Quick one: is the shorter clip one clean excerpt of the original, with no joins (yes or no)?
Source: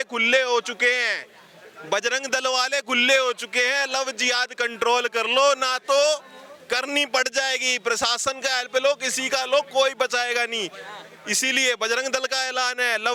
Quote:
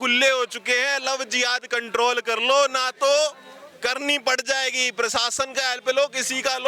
yes